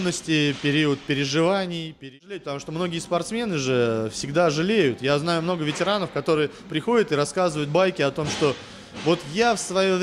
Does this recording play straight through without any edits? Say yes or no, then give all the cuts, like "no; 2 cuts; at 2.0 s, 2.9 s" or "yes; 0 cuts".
no; 1 cut; at 2.1 s